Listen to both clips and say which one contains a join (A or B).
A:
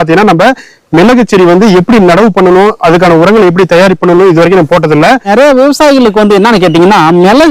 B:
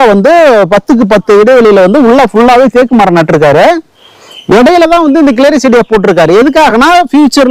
A